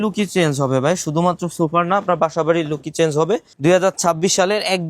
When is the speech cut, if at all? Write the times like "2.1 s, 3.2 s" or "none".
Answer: 3.5 s